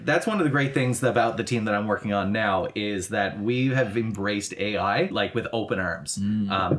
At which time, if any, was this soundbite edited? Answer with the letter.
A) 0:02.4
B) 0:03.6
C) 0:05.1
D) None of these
C